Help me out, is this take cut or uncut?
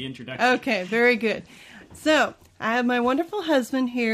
uncut